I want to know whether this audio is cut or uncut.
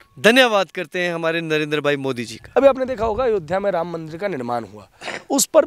cut